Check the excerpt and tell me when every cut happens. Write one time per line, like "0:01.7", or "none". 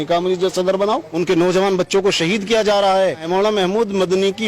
0:01.1
0:03.2

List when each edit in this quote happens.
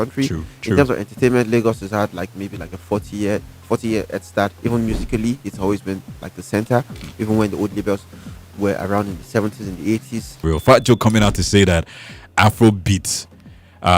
0:10.4

